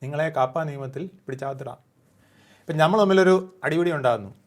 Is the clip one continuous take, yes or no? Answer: yes